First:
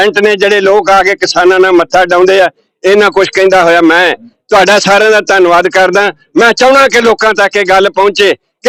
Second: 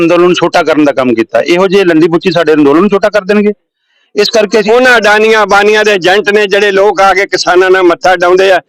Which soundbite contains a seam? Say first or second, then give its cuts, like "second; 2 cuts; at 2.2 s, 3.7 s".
second; 1 cut; at 4.6 s